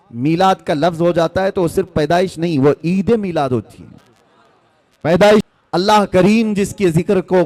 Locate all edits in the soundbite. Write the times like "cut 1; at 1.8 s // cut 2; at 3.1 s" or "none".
cut 1; at 5.5 s